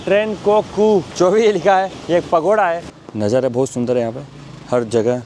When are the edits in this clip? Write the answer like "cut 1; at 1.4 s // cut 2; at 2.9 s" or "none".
cut 1; at 1.1 s // cut 2; at 2.0 s // cut 3; at 2.9 s